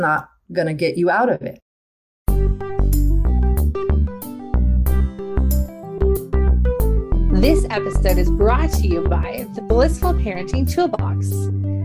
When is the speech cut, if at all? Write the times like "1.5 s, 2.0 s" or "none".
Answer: 2.0 s